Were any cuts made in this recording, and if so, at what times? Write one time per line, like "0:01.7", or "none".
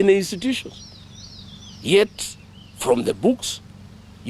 none

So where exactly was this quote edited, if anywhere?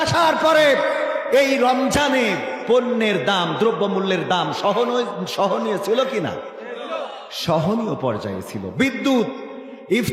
none

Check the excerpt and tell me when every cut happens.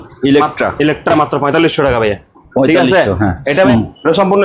0:03.5

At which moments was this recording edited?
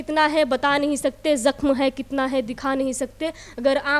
none

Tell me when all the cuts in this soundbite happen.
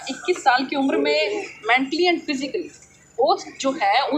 none

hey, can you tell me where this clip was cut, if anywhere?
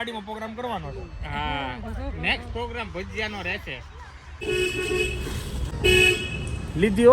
0:04.4
0:05.7

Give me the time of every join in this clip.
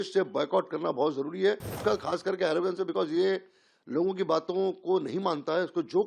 0:01.8

